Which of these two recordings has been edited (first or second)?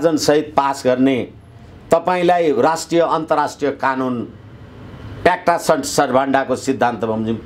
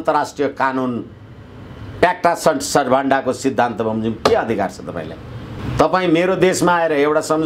second